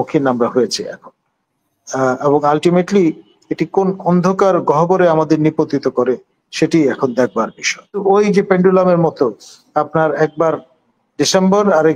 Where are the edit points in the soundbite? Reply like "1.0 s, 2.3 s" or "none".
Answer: 8.0 s